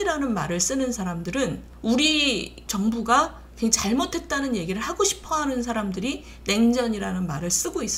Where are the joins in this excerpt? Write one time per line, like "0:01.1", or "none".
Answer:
0:01.7
0:02.6